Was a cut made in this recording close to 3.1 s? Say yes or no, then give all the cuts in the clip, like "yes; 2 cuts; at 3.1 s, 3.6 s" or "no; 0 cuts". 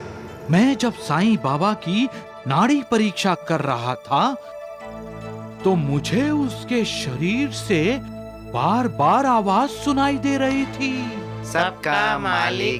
no; 0 cuts